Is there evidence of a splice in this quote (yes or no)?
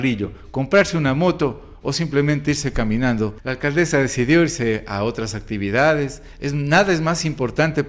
yes